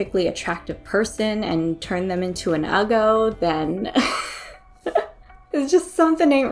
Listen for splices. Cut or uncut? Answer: uncut